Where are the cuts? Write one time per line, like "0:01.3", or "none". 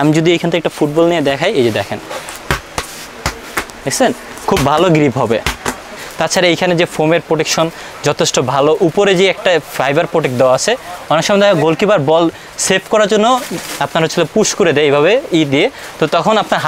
0:06.0